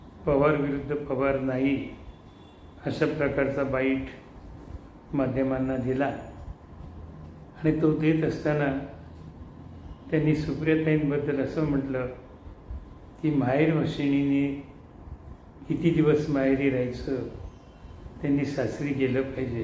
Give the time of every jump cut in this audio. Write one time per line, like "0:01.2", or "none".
none